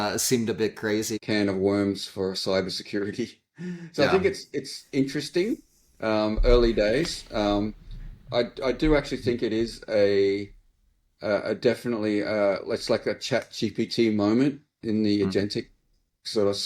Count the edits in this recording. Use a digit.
1